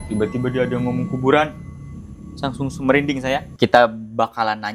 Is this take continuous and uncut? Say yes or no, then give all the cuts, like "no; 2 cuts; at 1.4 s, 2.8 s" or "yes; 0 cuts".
no; 1 cut; at 3.5 s